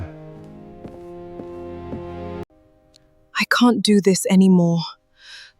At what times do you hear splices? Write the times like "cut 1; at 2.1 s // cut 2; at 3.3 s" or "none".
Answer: cut 1; at 2.5 s